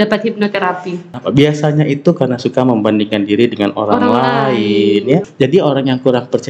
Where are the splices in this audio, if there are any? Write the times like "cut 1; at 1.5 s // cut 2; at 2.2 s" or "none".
cut 1; at 1.1 s // cut 2; at 5.3 s